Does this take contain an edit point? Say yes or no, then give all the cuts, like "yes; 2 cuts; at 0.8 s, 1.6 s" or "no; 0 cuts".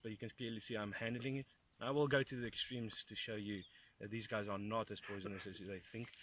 no; 0 cuts